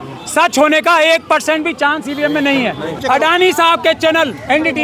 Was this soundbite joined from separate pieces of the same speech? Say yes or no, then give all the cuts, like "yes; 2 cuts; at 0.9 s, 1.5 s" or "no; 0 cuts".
yes; 1 cut; at 3.0 s